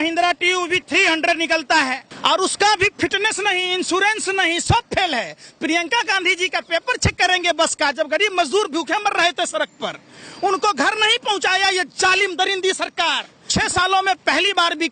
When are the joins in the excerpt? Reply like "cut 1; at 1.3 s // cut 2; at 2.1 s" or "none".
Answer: cut 1; at 2.1 s // cut 2; at 13.3 s

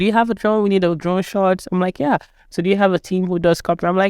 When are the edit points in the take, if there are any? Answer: none

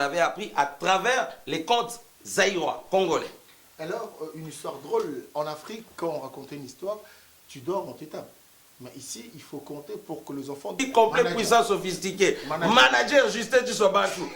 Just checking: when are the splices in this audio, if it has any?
cut 1; at 10.8 s

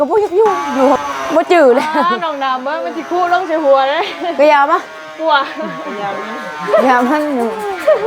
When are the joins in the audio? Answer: cut 1; at 1.0 s

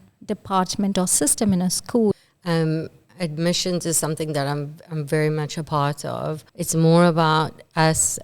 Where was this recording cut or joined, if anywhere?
cut 1; at 2.1 s // cut 2; at 6.5 s

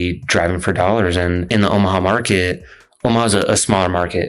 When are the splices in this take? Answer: cut 1; at 1.5 s

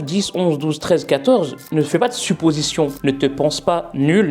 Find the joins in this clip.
cut 1; at 1.6 s

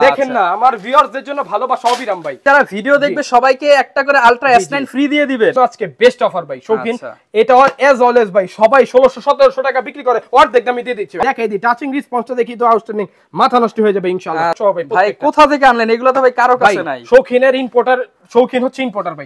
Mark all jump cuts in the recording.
cut 1; at 2.4 s // cut 2; at 5.5 s // cut 3; at 11.1 s // cut 4; at 14.6 s

